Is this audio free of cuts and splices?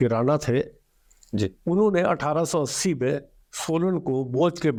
yes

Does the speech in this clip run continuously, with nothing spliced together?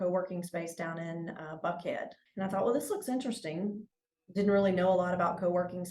no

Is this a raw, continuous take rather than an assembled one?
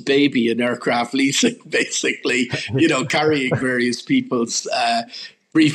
yes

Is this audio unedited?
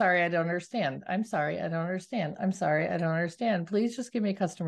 yes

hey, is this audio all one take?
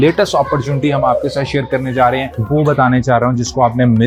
yes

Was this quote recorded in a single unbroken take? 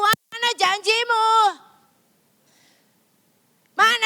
yes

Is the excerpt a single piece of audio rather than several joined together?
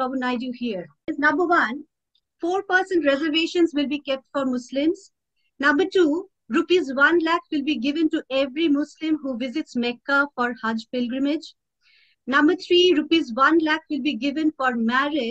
no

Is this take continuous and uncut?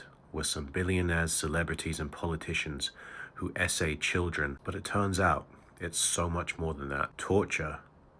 yes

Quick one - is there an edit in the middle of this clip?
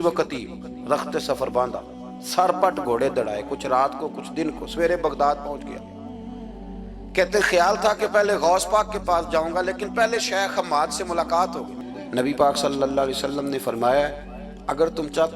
yes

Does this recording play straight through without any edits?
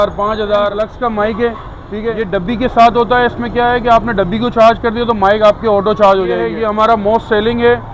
no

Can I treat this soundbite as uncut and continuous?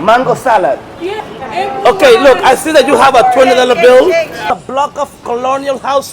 no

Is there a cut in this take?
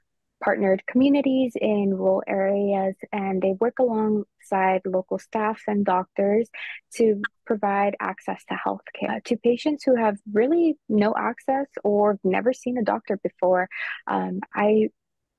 no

